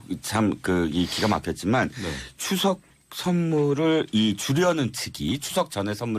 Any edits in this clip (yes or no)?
yes